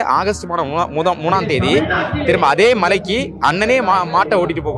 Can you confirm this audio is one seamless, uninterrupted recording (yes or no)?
yes